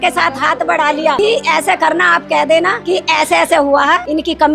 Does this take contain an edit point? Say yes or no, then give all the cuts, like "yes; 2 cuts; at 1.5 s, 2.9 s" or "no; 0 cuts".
no; 0 cuts